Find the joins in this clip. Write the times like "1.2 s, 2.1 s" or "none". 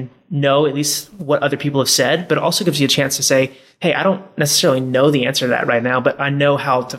none